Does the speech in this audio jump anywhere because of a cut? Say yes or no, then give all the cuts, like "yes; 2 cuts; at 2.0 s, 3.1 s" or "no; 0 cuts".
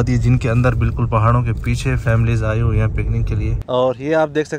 yes; 1 cut; at 3.5 s